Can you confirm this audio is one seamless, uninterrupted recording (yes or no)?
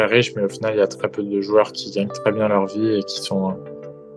yes